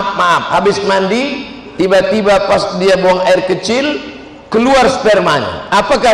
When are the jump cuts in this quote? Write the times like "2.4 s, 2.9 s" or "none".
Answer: none